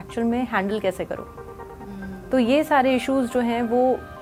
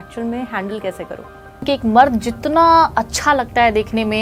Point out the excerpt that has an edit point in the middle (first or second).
second